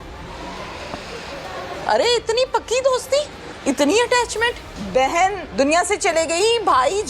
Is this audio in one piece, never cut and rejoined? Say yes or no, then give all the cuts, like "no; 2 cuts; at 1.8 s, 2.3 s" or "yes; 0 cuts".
no; 4 cuts; at 1.8 s, 3.4 s, 4.7 s, 5.4 s